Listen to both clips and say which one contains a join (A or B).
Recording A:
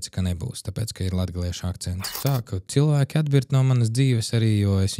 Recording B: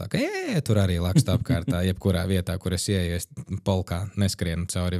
A